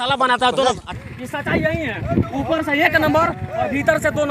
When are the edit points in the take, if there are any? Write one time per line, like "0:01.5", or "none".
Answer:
0:01.0